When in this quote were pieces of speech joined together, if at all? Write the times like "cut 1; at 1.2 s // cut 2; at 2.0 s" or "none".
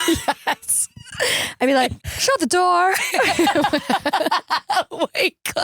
cut 1; at 2.0 s